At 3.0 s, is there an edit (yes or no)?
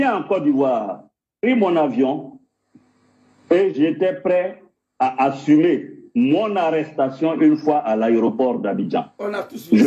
no